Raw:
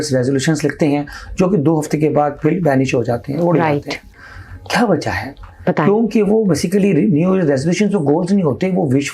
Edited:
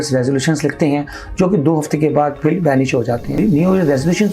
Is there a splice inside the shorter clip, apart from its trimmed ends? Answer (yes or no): yes